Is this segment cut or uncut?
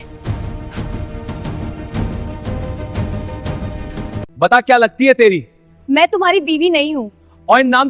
uncut